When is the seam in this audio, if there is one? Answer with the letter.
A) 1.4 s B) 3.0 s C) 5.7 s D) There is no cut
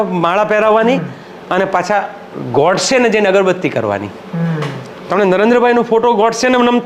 D